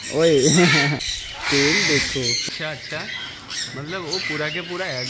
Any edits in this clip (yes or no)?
yes